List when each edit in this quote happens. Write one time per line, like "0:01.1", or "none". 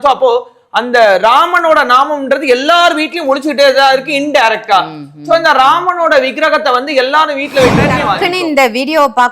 0:08.0